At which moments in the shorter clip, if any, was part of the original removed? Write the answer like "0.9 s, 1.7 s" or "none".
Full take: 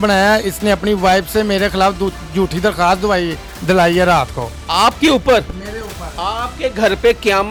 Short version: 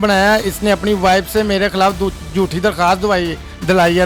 none